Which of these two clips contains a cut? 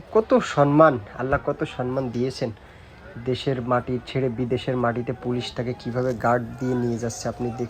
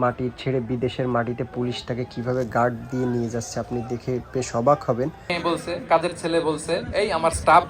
second; 1 cut; at 5.3 s

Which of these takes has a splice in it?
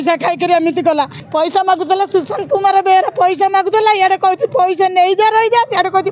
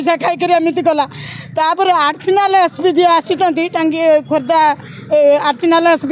first; 1 cut; at 1.2 s

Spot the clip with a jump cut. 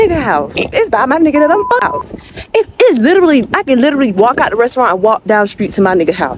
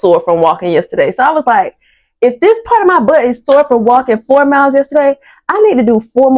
first; 1 cut; at 1.8 s

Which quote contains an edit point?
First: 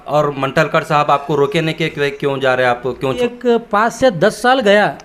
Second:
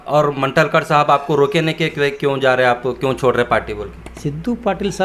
first; 1 cut; at 3.2 s

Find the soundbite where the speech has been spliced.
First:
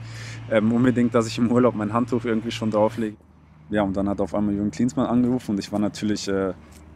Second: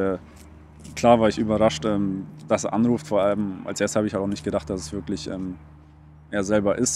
first; 1 cut; at 3.2 s

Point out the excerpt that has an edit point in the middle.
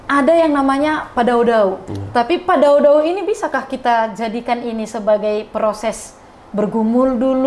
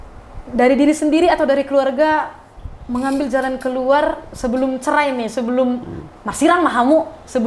first; 1 cut; at 1.9 s

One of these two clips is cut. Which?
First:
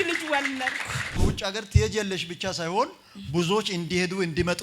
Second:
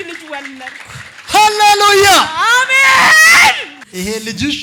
first; 1 cut; at 1.2 s

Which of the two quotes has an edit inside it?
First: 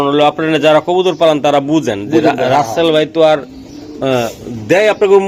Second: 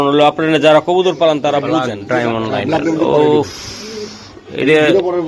second; 1 cut; at 1.9 s

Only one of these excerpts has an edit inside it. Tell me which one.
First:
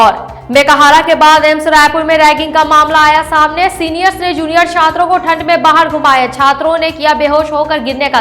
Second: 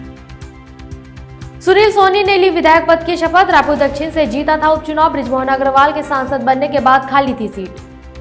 second; 1 cut; at 1.2 s

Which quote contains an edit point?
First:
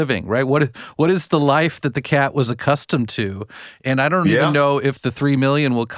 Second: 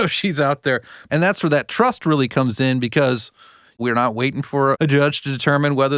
second; 3 cuts; at 0.9 s, 3.6 s, 4.8 s

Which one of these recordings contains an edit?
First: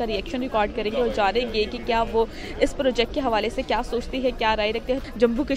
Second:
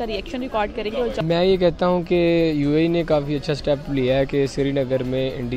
second; 1 cut; at 1.2 s

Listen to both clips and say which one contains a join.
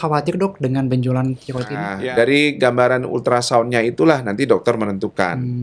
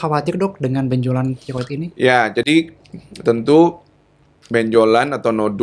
first; 1 cut; at 1.9 s

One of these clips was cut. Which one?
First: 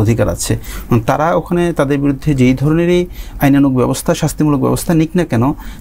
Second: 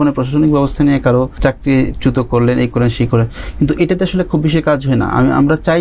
second; 1 cut; at 1.4 s

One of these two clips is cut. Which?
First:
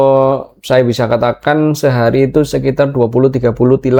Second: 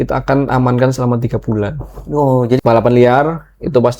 second; 1 cut; at 2.6 s

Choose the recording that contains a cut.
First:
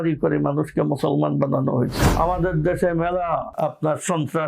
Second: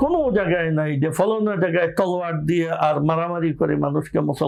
first; 2 cuts; at 2.0 s, 3.5 s

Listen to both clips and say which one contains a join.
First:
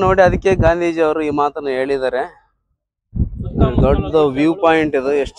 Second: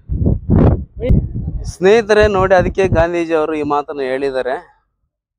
second; 1 cut; at 1.1 s

